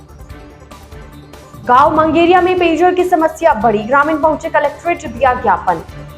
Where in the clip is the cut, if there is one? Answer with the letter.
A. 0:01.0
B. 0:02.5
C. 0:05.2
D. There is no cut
A